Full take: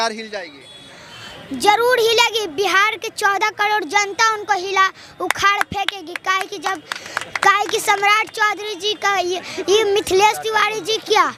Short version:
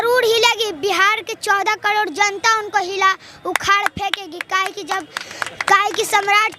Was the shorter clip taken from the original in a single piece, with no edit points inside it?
yes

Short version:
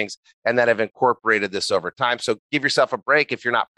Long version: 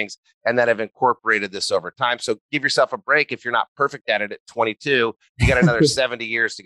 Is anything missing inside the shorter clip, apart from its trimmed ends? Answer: no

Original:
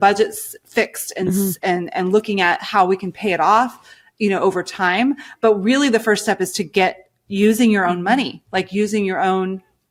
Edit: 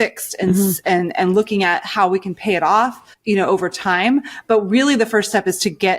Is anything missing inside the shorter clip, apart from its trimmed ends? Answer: yes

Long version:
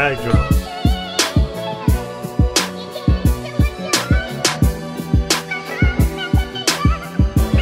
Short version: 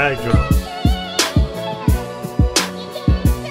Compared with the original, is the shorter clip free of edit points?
yes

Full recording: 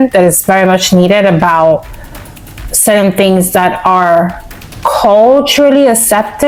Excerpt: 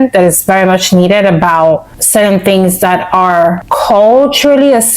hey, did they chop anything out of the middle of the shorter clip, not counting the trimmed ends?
yes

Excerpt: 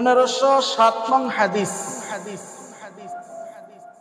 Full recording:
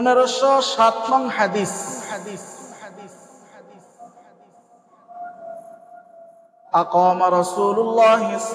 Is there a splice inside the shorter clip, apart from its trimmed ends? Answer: yes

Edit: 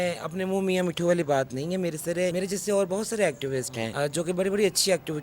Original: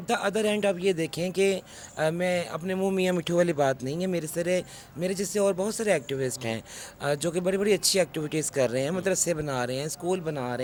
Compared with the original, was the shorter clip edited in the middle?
yes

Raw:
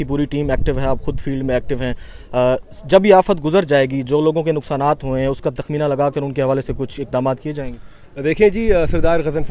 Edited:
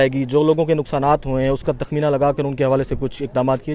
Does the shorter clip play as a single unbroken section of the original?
yes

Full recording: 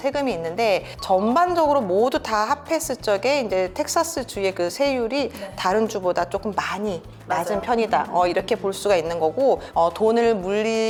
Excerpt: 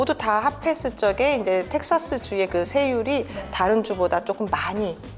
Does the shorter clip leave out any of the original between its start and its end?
no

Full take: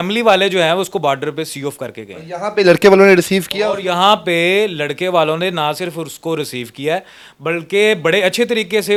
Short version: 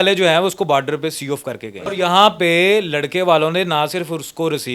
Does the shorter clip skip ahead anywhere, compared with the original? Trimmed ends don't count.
yes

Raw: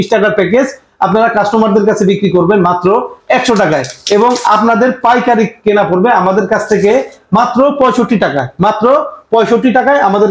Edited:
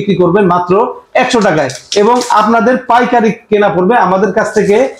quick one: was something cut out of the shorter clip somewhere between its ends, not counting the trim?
no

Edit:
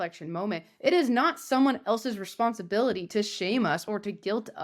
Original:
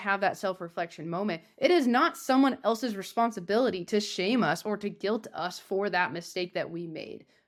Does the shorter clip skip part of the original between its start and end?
no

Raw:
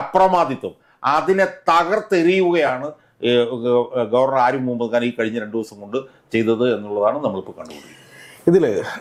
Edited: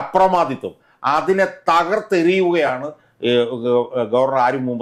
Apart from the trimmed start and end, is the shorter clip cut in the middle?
no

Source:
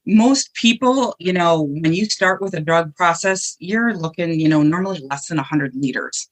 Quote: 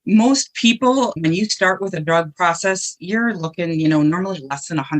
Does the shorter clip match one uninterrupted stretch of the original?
no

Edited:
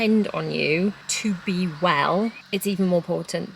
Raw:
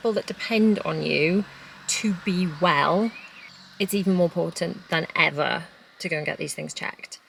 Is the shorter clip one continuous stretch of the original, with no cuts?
no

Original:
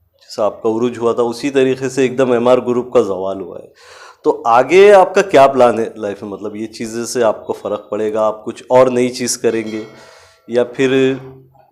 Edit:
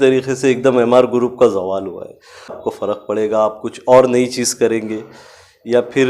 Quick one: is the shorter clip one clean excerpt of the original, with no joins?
no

